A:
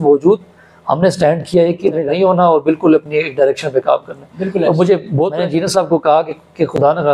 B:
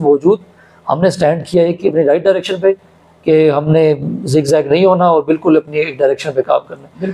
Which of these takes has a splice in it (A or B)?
A